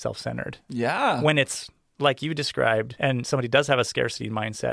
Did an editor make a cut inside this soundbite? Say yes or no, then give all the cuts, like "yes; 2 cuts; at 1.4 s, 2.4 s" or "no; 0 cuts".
yes; 2 cuts; at 1.2 s, 2.9 s